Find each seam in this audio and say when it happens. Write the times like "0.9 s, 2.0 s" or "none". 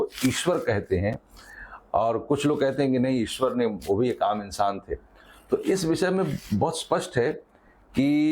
none